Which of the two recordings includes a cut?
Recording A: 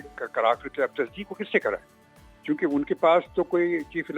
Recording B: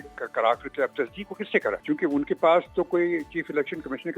B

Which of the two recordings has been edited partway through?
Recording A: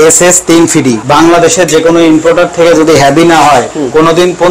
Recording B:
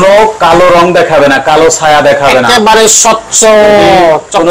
A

